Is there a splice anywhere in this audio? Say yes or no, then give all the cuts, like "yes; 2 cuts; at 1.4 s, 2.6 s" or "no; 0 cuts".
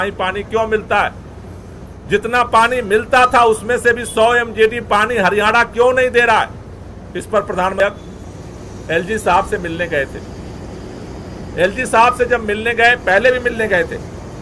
yes; 1 cut; at 7.8 s